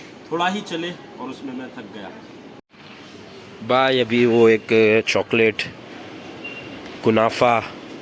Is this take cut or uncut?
cut